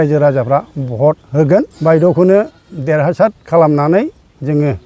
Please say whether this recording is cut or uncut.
cut